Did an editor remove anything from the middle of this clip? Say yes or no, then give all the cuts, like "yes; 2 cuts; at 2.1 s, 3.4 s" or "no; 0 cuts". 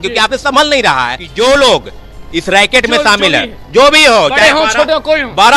yes; 1 cut; at 1.2 s